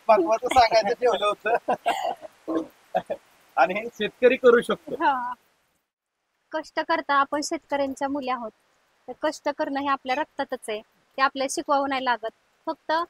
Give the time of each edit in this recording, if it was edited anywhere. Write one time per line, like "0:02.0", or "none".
0:05.8

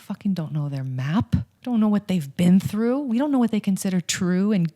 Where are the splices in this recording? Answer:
0:01.5

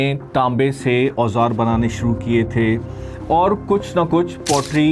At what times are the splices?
none

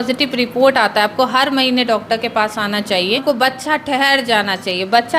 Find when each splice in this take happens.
0:03.2

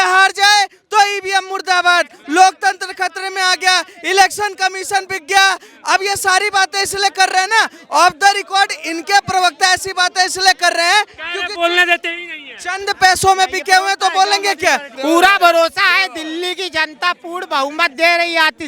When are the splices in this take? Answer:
0:14.9

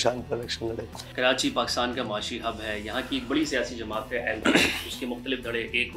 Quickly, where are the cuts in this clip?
none

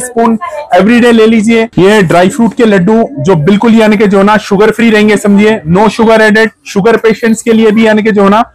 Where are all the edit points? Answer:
0:01.7

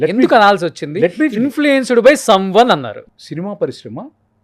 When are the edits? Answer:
0:03.1

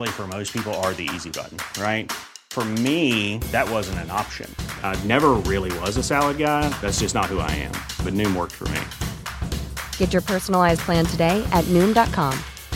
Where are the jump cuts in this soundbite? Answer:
none

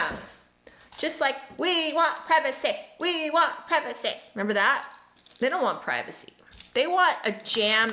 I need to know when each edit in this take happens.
none

